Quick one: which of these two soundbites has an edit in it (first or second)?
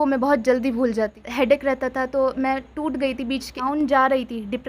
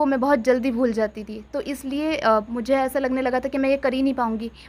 first